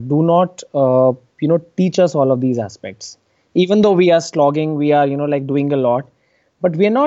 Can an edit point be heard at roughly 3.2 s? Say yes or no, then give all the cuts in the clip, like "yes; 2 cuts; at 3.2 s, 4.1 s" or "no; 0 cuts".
no; 0 cuts